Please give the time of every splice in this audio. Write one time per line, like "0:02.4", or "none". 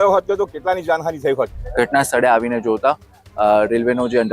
0:01.6